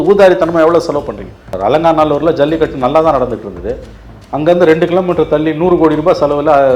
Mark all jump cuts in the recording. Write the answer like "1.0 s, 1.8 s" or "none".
1.4 s